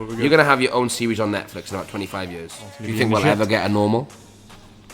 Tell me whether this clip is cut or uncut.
cut